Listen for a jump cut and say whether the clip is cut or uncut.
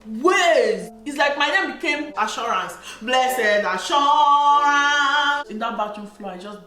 cut